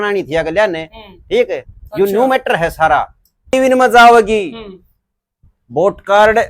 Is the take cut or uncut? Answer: cut